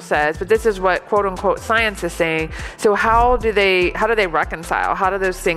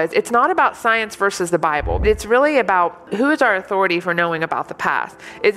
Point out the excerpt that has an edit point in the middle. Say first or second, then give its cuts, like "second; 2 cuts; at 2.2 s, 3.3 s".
second; 2 cuts; at 2.0 s, 3.1 s